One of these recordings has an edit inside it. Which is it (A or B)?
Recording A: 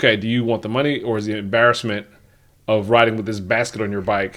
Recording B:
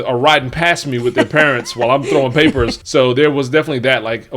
B